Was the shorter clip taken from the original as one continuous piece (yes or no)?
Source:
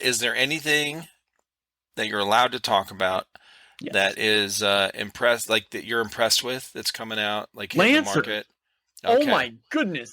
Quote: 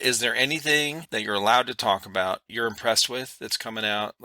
no